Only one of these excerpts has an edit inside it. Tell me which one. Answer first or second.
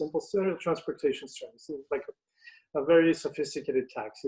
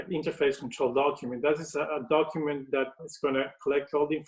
second